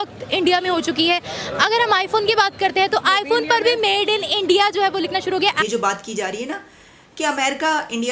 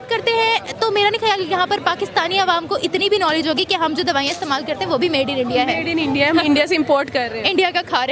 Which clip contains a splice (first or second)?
first